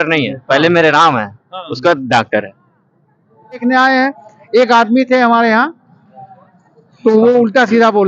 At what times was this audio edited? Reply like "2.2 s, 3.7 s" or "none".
3.6 s